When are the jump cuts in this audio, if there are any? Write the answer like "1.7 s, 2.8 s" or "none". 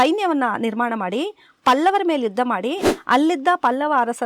2.9 s